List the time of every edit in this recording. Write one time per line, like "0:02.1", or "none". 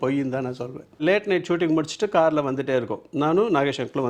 0:01.0

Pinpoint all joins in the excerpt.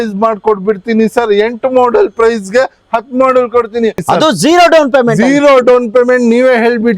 0:04.0

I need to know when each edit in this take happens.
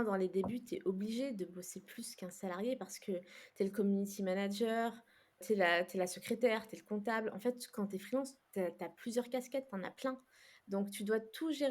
0:05.4

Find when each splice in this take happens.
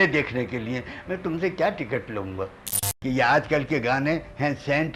0:02.9

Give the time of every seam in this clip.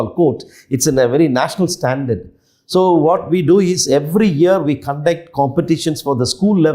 none

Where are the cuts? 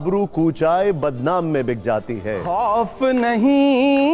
0:02.4

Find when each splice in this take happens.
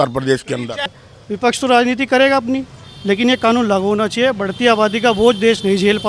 0:00.9

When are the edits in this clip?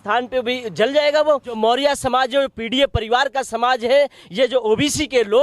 0:01.6

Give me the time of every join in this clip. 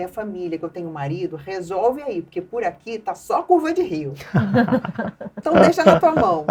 none

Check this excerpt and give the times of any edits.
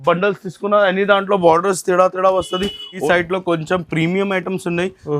0:03.0

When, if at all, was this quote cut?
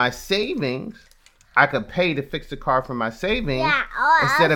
none

